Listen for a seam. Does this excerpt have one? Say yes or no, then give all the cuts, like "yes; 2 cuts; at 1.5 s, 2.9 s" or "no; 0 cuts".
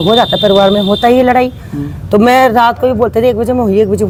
no; 0 cuts